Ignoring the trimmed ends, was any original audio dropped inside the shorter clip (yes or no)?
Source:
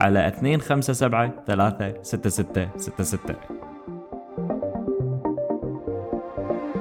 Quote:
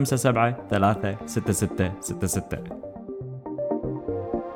yes